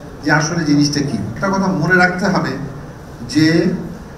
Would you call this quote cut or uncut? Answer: cut